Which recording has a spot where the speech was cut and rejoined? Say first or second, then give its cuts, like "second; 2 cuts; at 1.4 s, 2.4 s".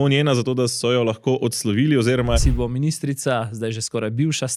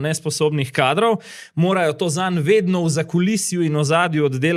first; 1 cut; at 2.4 s